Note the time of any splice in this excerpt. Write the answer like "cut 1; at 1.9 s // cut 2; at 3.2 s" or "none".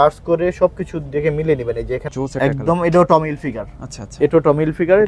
cut 1; at 2.1 s